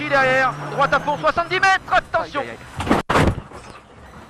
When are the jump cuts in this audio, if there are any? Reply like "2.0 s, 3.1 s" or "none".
none